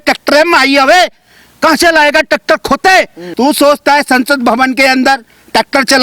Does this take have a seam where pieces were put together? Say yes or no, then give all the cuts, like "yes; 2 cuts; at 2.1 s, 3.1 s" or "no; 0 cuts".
yes; 1 cut; at 3.2 s